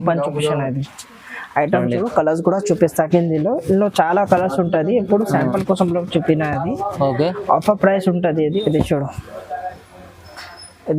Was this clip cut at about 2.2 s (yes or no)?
no